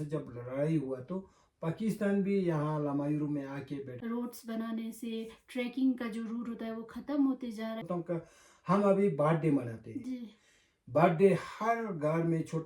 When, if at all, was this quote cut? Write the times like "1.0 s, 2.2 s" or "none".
3.9 s, 7.8 s